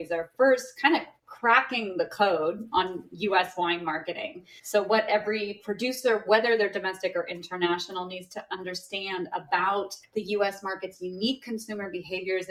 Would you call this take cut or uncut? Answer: uncut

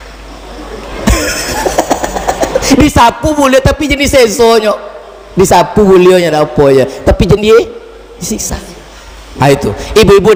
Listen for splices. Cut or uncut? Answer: uncut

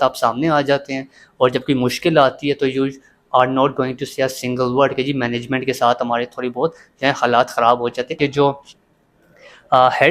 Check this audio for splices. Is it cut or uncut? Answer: cut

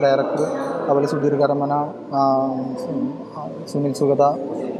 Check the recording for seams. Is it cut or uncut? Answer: uncut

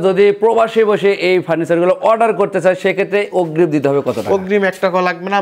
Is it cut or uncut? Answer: uncut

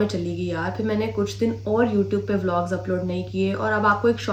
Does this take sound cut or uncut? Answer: uncut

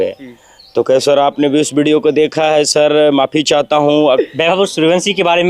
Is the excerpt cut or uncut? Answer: cut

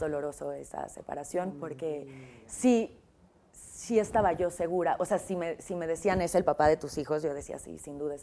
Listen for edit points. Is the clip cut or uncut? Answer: uncut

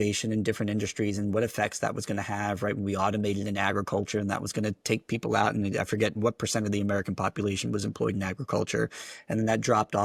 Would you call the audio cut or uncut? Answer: uncut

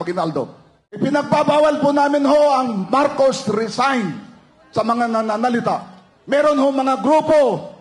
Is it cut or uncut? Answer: cut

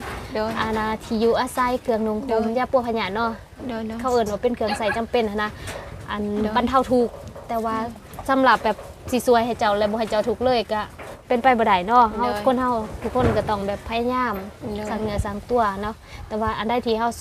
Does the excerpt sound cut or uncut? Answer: uncut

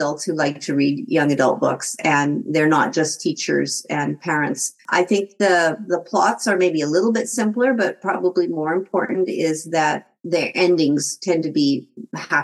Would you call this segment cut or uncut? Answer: cut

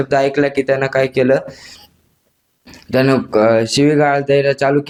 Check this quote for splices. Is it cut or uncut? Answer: uncut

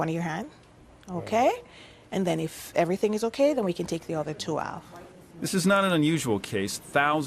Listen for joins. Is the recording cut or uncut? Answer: cut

